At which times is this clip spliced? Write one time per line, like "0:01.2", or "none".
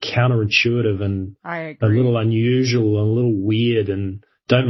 none